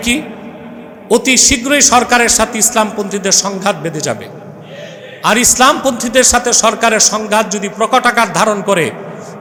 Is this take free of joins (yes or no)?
yes